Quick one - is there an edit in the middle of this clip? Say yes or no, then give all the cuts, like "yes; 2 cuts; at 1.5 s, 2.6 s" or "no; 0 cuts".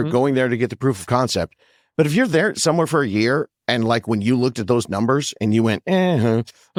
no; 0 cuts